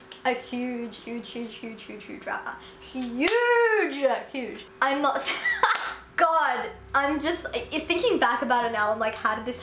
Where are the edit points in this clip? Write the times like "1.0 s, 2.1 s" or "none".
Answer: 6.1 s